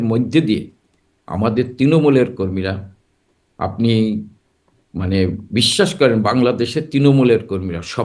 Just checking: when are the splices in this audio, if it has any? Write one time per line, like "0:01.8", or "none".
none